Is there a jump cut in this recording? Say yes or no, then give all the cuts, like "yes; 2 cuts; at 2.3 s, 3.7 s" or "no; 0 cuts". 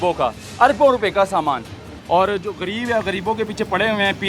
yes; 1 cut; at 1.9 s